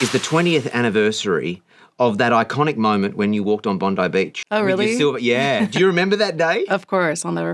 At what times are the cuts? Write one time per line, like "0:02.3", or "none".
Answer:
0:04.4